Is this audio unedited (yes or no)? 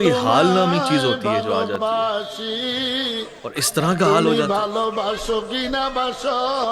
yes